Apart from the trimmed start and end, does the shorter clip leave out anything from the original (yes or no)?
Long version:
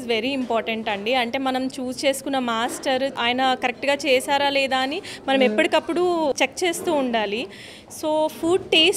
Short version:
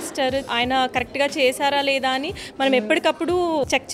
no